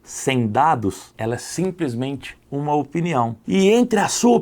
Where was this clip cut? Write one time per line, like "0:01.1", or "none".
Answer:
0:01.1
0:03.4